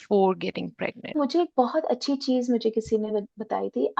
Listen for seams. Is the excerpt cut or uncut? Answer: cut